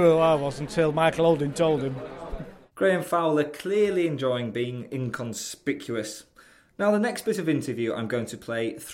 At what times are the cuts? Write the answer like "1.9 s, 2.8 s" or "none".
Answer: none